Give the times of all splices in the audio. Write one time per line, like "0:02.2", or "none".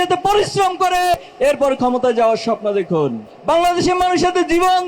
0:01.2
0:03.3